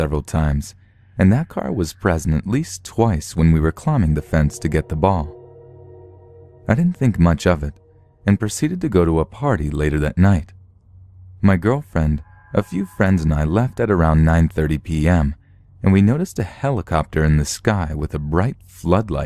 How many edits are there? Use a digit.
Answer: 1